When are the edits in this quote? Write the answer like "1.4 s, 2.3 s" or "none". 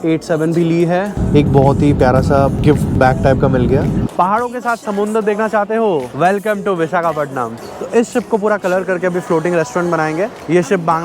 1.2 s, 2.6 s, 4.1 s, 6.1 s, 7.6 s